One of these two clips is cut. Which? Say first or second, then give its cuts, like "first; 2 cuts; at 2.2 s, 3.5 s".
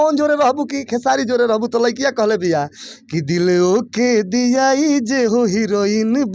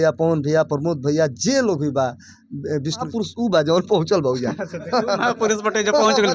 second; 1 cut; at 3.1 s